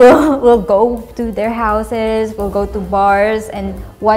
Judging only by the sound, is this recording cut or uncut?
uncut